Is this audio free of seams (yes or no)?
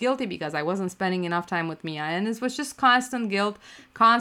yes